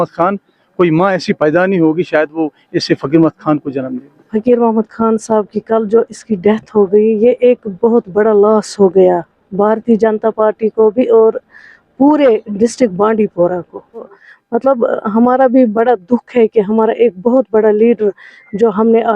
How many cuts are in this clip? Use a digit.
2